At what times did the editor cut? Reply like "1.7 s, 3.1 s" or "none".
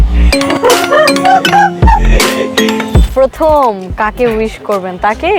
3.1 s

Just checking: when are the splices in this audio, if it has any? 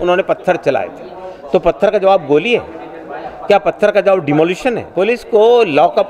4.8 s

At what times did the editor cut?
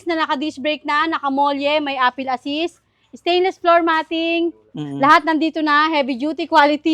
none

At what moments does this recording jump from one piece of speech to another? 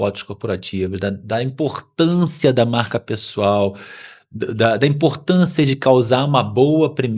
none

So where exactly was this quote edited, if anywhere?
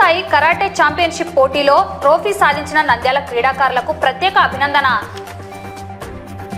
5.0 s

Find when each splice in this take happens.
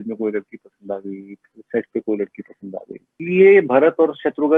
3.2 s

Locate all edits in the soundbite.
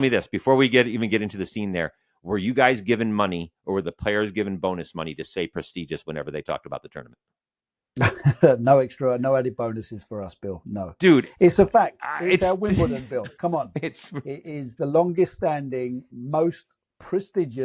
none

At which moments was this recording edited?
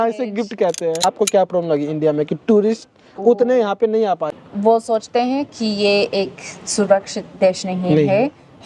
1.0 s, 4.3 s

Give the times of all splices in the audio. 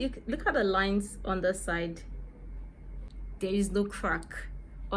3.1 s

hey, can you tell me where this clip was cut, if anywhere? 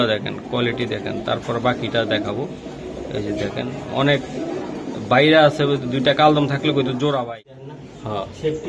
7.4 s

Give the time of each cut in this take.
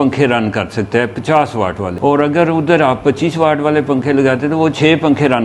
1.9 s

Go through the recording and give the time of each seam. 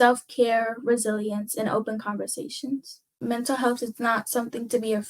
3.2 s

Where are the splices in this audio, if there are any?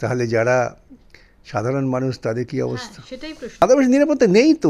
3.6 s

